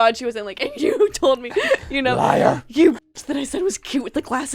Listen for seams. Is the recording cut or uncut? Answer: uncut